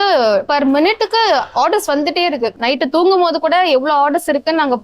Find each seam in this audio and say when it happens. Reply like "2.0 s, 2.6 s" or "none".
2.5 s